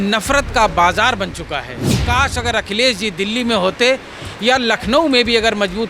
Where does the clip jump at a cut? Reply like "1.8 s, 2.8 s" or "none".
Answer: 1.9 s